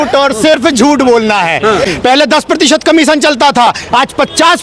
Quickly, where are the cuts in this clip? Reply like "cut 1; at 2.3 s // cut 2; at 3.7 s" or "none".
cut 1; at 1.9 s